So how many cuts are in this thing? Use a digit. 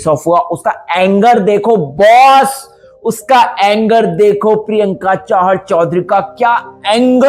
0